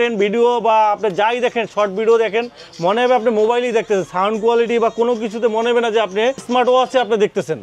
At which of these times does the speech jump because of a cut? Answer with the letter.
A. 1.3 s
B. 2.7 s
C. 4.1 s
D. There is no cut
D